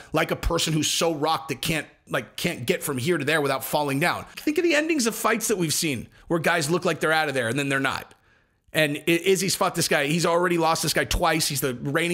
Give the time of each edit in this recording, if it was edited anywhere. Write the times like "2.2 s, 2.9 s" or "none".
4.3 s

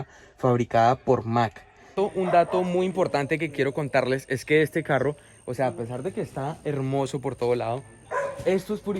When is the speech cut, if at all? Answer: 1.9 s

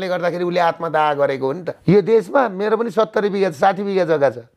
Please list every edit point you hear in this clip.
1.7 s

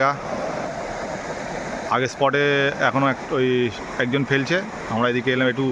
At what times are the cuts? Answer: none

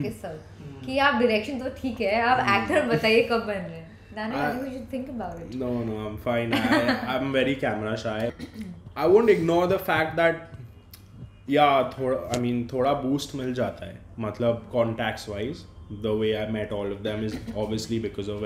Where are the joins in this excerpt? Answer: 8.3 s

